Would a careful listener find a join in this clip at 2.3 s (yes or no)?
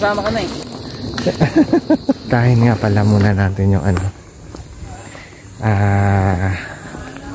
yes